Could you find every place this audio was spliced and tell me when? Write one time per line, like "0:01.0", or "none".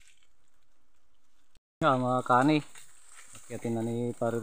0:01.6